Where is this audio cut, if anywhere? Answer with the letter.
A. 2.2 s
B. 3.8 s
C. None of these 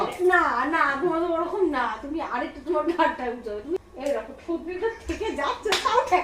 B